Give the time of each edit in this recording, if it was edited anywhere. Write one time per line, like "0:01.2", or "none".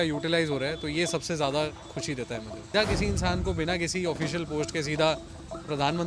0:02.7